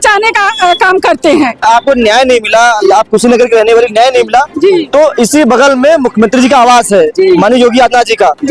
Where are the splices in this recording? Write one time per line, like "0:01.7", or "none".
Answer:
0:01.6